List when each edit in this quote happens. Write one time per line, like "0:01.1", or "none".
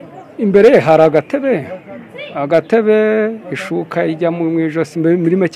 none